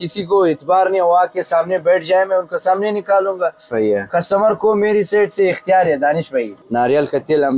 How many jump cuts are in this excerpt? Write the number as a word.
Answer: one